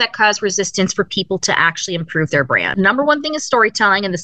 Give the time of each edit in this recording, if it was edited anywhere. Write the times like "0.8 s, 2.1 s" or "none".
2.7 s

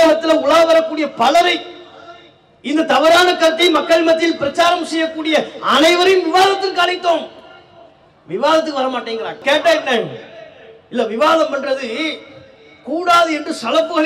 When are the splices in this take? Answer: none

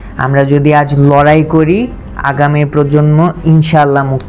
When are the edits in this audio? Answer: none

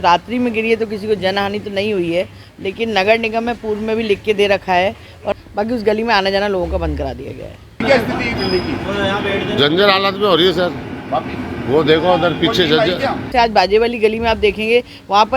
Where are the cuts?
5.2 s, 7.8 s, 13.3 s

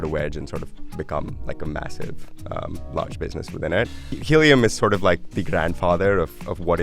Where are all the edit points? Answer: 4.1 s

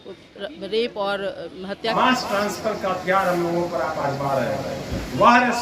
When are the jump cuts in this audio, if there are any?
1.9 s

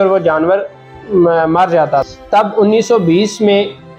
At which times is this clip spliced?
2.2 s

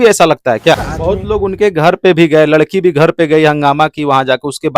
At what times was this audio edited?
0.9 s

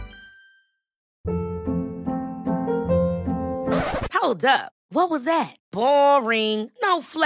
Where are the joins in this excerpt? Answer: 1.1 s

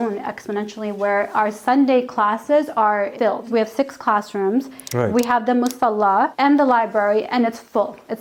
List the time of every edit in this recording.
none

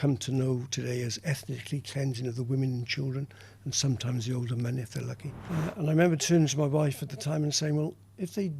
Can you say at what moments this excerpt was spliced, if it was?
5.3 s

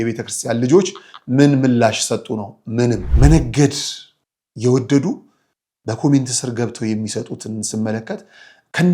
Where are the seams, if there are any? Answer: 3.1 s

